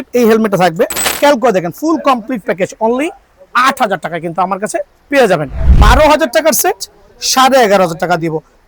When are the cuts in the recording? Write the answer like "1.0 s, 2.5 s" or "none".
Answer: 1.0 s, 5.5 s